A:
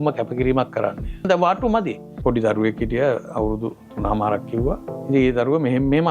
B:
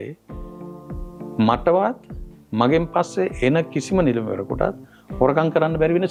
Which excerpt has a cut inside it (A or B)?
A